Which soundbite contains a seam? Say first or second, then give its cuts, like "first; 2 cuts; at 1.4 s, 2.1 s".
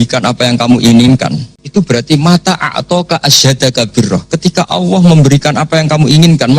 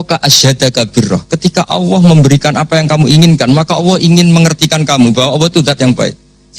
first; 1 cut; at 1.5 s